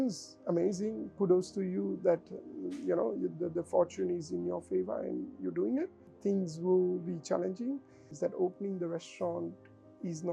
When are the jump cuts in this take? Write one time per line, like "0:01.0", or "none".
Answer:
0:06.1
0:08.1